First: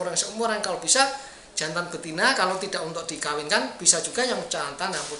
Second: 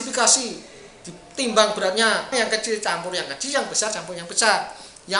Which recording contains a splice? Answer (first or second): second